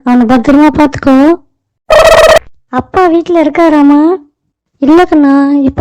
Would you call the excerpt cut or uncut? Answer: cut